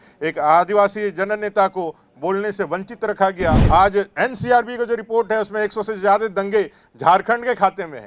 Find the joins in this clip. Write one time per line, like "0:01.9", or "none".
0:03.6